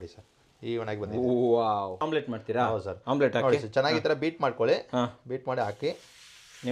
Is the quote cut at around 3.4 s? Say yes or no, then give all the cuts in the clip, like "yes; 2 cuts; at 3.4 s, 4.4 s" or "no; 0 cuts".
no; 1 cut; at 2.0 s